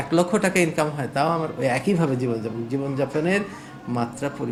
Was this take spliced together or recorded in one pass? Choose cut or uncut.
uncut